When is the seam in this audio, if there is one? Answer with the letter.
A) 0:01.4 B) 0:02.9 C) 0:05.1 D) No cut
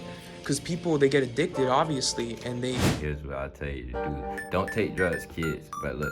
B